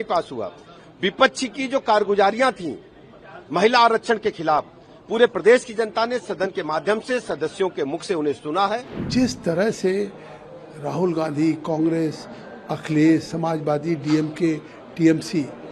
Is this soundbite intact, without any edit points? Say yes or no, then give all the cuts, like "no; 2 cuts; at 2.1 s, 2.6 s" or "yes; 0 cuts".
no; 1 cut; at 9.0 s